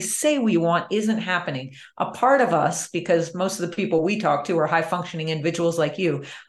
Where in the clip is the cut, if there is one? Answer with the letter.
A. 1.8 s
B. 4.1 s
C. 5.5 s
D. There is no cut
D